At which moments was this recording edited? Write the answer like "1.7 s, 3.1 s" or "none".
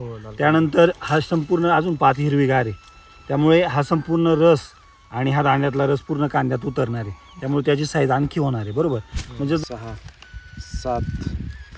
9.6 s

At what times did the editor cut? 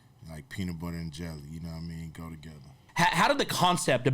2.8 s

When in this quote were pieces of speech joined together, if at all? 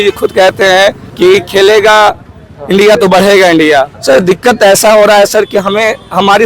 1.0 s, 3.9 s

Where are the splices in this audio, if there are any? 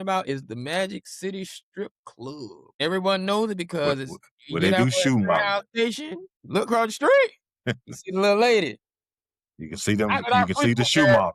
2.8 s

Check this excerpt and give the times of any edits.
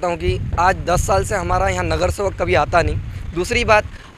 none

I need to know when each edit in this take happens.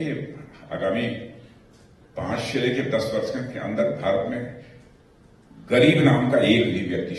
none

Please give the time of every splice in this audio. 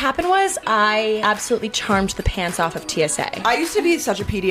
1.2 s, 3.4 s

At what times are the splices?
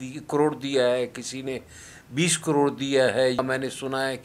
none

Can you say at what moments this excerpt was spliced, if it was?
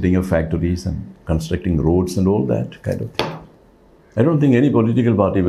none

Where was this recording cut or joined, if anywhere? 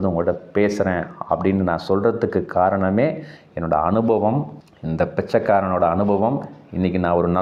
none

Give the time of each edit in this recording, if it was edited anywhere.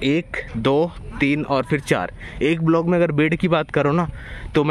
none

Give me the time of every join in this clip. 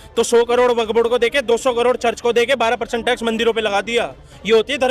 none

